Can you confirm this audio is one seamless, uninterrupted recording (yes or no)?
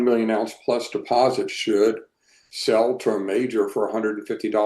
yes